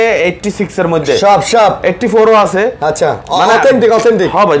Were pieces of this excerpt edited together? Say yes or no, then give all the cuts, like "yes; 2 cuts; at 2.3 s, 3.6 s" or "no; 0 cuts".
no; 0 cuts